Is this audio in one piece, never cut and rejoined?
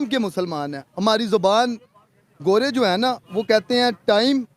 yes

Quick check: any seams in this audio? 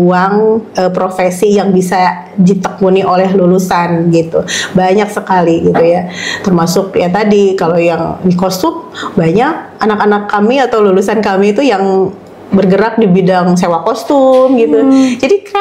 no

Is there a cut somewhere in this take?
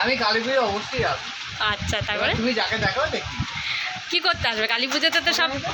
no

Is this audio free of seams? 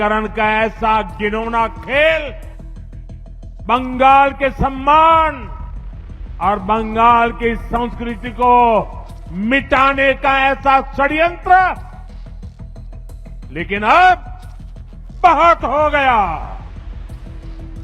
yes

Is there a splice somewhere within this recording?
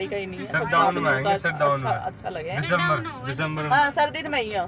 no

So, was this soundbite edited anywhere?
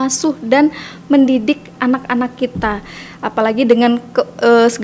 no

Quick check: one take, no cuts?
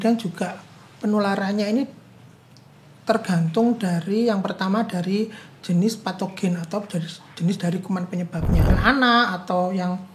no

